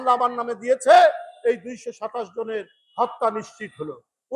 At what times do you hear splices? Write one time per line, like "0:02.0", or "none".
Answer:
none